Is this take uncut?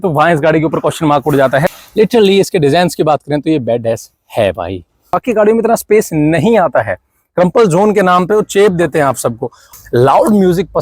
no; 3 cuts; at 1.7 s, 5.2 s, 9.7 s

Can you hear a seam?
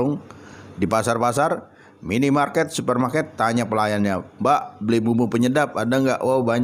no; 0 cuts

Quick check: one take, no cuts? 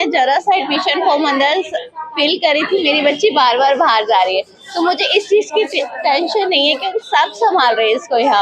yes; 0 cuts

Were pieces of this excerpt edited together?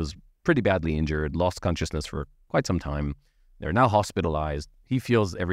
no; 0 cuts

